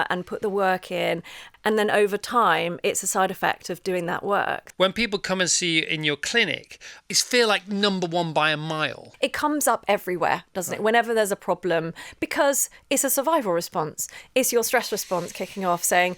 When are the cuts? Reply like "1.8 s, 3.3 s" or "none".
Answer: 1.4 s, 4.6 s, 7.0 s, 9.1 s